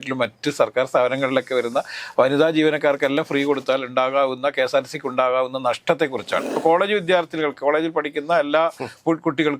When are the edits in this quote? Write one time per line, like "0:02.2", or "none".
0:06.5